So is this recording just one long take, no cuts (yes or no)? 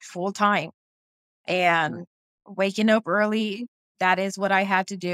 no